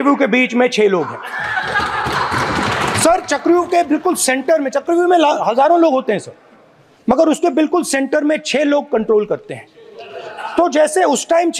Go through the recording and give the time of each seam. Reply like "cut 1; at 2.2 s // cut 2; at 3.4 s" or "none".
none

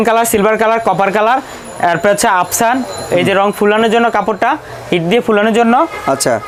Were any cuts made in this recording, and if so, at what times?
none

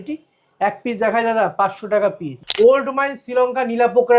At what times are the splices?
cut 1; at 2.3 s

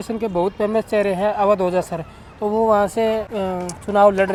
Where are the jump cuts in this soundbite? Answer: none

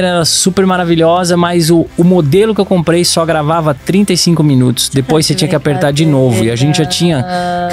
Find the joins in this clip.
cut 1; at 1.9 s

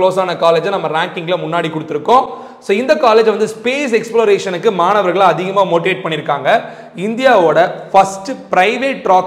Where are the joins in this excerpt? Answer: none

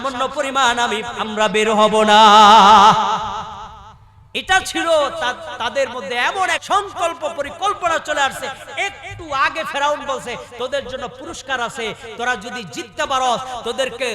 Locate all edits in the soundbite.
cut 1; at 6.6 s

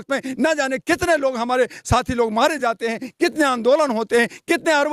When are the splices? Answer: none

